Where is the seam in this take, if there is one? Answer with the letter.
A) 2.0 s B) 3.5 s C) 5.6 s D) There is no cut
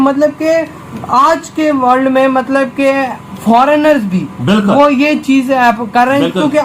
D